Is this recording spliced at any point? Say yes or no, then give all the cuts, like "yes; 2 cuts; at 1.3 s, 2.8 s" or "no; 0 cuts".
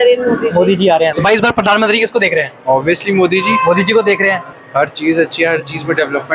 yes; 2 cuts; at 1.1 s, 4.5 s